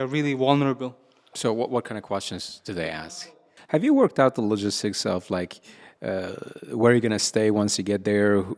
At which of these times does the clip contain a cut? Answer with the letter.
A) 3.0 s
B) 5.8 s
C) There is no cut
A